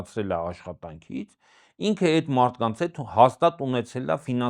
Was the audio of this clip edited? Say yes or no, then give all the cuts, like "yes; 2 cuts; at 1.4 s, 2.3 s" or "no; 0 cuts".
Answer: no; 0 cuts